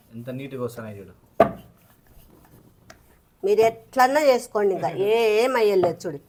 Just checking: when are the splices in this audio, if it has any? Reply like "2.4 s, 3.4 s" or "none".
none